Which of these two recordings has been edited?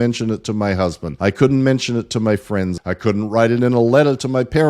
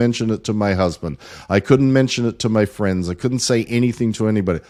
first; 2 cuts; at 1.1 s, 2.8 s

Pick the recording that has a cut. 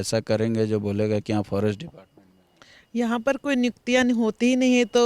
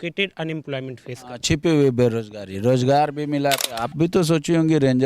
second; 1 cut; at 3.7 s

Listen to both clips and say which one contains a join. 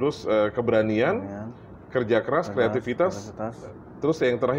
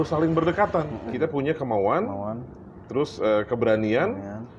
second; 1 cut; at 1.1 s

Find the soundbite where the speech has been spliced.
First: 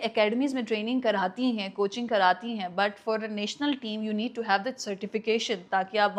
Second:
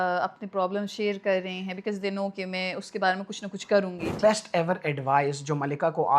second; 1 cut; at 4.2 s

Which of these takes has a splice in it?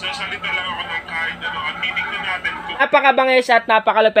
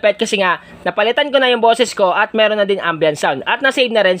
first; 1 cut; at 2.8 s

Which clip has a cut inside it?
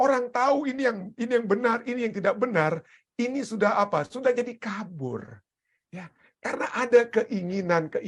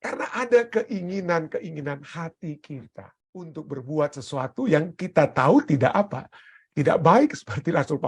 second; 1 cut; at 3.5 s

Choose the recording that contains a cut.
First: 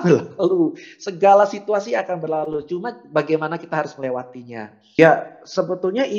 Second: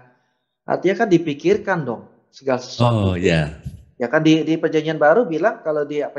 first; 1 cut; at 5.0 s

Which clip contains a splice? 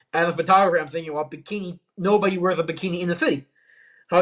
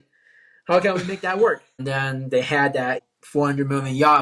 second; 2 cuts; at 1.7 s, 3.1 s

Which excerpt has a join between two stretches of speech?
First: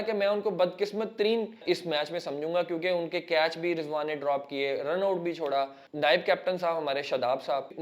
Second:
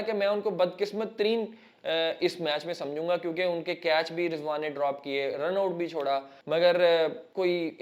first; 2 cuts; at 1.6 s, 5.8 s

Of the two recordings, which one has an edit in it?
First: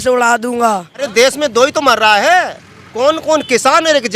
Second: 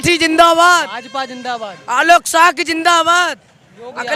first; 1 cut; at 1.1 s

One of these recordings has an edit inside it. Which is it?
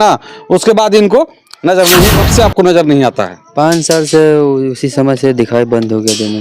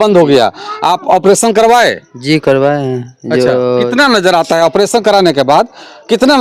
first; 1 cut; at 2.2 s

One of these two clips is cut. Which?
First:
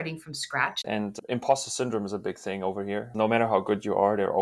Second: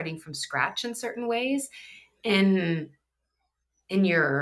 first; 2 cuts; at 0.8 s, 3.1 s

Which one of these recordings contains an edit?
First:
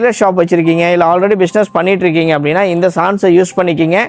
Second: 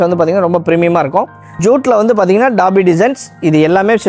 second; 1 cut; at 1.4 s

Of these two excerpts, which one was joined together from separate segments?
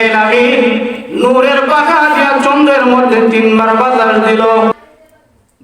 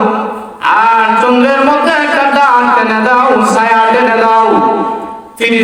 first; 1 cut; at 4.7 s

